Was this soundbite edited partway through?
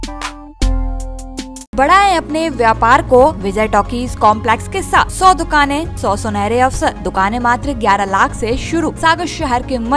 yes; 6 cuts; at 1.7 s, 3.4 s, 5.1 s, 5.9 s, 7.0 s, 9.0 s

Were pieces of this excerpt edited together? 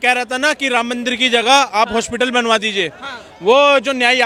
no; 0 cuts

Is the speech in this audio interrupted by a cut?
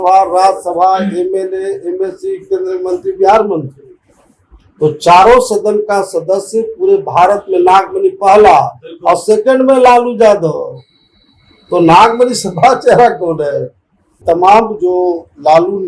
yes; 1 cut; at 14.2 s

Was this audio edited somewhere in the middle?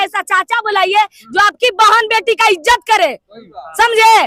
no; 0 cuts

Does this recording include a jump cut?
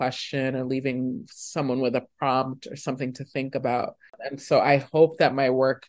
yes; 1 cut; at 4.2 s

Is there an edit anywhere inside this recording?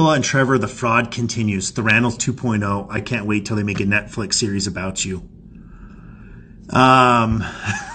no; 0 cuts

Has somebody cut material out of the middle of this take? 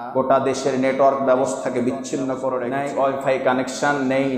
yes; 1 cut; at 2.7 s

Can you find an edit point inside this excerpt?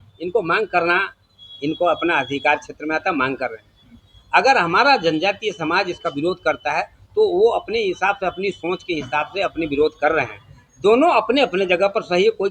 no; 0 cuts

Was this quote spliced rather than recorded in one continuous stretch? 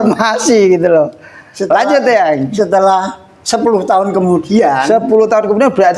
no; 0 cuts

